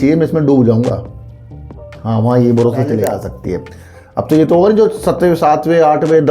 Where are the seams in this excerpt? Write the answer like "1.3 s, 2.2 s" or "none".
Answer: 3.2 s